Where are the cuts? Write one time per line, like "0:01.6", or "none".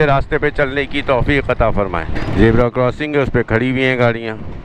0:02.2